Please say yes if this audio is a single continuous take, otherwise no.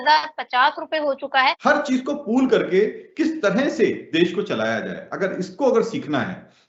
no